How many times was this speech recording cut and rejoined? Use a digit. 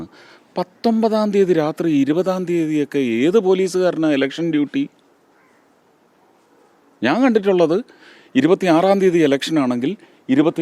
0